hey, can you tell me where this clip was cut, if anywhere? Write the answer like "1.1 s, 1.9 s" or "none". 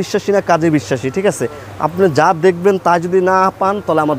none